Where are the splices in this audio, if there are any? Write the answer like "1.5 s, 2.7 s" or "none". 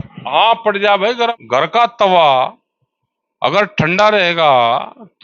1.3 s